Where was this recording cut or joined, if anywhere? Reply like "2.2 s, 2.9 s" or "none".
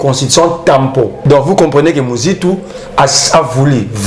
1.2 s